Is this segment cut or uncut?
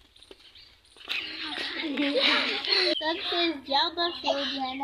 cut